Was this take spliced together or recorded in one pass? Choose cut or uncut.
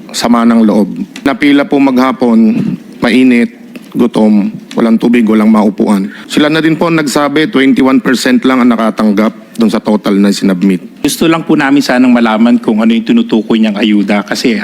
cut